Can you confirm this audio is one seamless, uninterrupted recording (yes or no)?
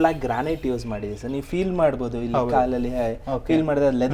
yes